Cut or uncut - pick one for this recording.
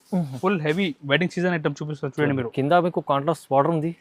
uncut